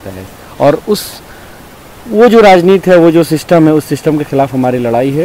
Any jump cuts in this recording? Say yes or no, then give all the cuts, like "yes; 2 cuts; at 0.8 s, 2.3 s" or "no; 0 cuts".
no; 0 cuts